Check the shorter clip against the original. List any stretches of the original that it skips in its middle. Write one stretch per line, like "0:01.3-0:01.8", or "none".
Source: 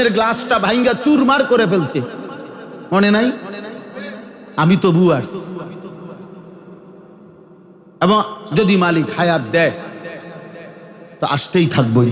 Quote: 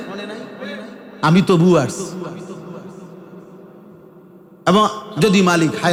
none

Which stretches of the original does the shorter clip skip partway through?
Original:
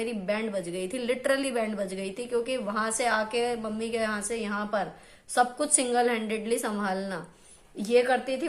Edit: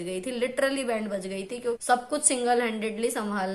0:02.5-0:05.3

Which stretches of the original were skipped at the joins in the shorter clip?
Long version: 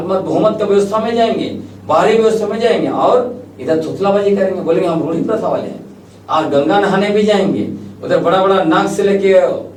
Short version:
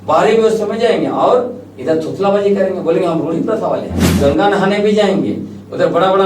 0:06.0-0:06.5

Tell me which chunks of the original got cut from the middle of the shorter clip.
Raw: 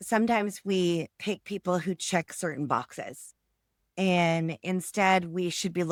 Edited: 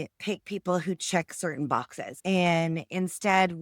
0:03.0-0:03.8

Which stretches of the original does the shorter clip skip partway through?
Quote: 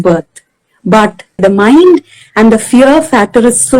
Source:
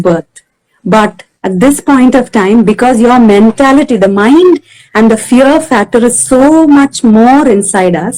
0:01.4-0:03.9

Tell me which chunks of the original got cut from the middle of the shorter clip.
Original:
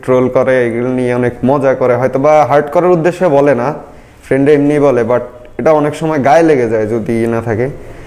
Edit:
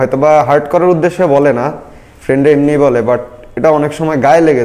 none

